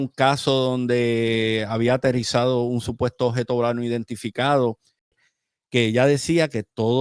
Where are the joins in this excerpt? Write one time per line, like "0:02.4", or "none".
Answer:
0:05.2